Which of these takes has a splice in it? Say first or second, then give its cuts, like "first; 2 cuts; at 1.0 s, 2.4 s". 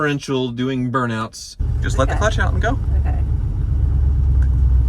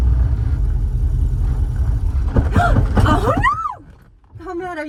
first; 1 cut; at 1.6 s